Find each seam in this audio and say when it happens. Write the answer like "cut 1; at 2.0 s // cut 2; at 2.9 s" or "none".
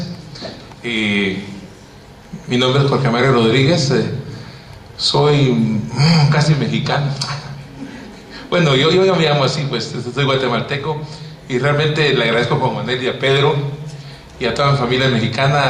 cut 1; at 6.5 s